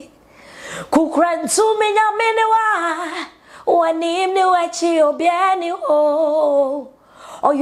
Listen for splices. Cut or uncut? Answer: uncut